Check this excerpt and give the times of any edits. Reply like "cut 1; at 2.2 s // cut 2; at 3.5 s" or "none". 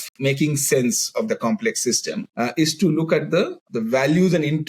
cut 1; at 2.2 s // cut 2; at 3.6 s